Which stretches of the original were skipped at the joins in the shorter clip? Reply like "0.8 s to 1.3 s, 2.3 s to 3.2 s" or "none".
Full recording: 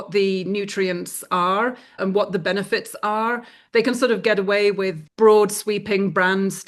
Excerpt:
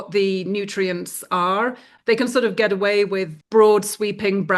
1.9 s to 3.5 s

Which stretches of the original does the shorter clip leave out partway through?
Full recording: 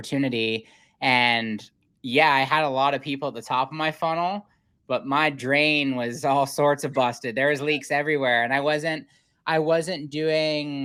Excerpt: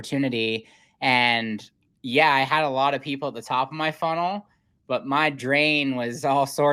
none

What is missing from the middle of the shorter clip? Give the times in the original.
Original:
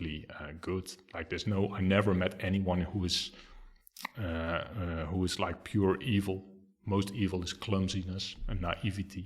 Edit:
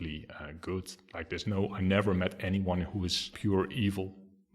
3.3 s to 5.6 s

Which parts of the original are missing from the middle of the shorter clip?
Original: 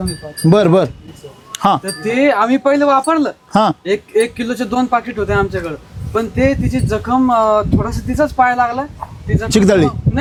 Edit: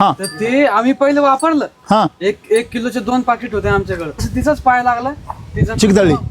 5.9 s to 7.9 s

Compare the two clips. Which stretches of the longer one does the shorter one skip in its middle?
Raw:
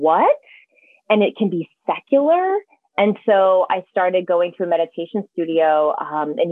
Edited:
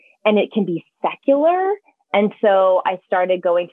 none

